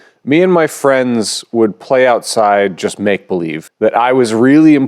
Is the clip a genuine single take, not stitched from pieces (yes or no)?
no